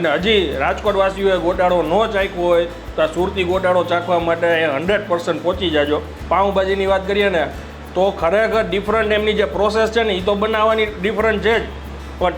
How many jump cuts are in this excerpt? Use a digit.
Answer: 1